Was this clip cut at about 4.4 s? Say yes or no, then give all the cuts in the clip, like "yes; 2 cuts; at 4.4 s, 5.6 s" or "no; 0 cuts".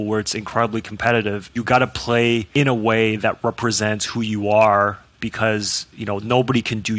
no; 2 cuts; at 1.4 s, 2.5 s